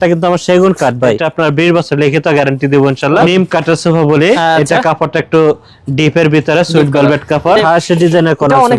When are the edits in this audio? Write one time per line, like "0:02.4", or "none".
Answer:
0:01.2
0:03.3
0:07.6